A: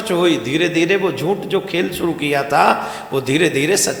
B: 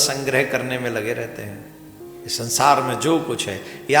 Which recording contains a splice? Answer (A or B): B